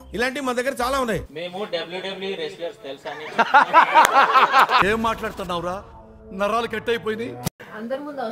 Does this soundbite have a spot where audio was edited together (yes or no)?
yes